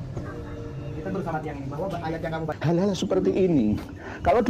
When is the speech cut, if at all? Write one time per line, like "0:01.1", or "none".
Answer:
0:02.6